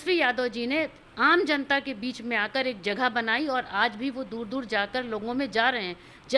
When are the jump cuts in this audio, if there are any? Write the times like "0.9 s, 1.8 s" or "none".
none